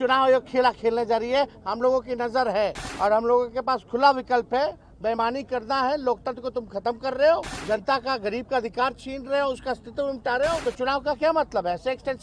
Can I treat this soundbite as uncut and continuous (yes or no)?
no